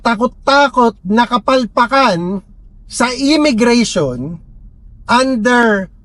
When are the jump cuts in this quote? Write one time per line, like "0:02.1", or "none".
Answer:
none